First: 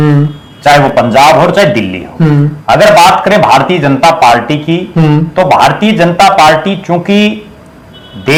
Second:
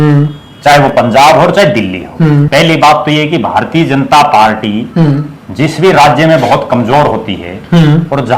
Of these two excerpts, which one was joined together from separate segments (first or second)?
second